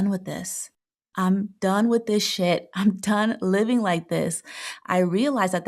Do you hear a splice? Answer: no; 0 cuts

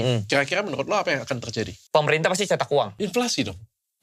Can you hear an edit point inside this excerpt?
yes; 2 cuts; at 1.8 s, 2.9 s

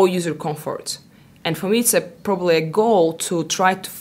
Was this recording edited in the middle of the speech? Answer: no; 0 cuts

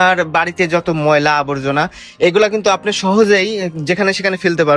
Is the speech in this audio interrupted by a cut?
no; 0 cuts

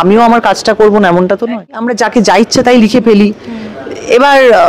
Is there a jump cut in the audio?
yes; 1 cut; at 1.9 s

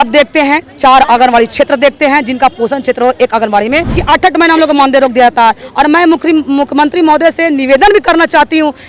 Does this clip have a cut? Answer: yes; 1 cut; at 4.0 s

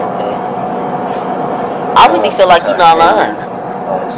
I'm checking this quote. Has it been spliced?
no; 0 cuts

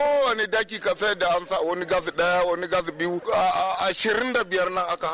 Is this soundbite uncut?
yes; 0 cuts

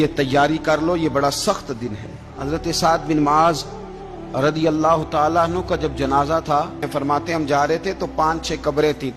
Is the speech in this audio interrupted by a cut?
yes; 2 cuts; at 2.3 s, 6.9 s

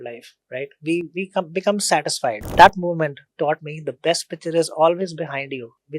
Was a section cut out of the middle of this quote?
yes; 1 cut; at 2.5 s

